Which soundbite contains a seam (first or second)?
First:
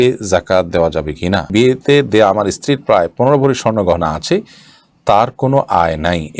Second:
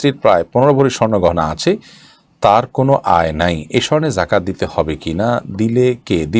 first